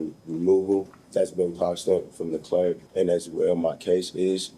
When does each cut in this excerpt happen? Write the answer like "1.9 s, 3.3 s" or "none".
1.0 s, 2.8 s